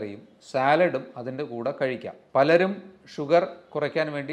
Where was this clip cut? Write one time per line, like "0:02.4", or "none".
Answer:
0:02.1